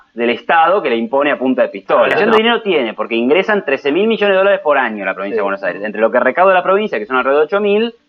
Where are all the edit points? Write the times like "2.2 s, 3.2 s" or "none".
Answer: 2.2 s